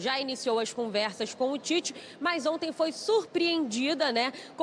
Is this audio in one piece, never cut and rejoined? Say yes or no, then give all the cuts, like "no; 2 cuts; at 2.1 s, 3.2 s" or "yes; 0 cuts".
yes; 0 cuts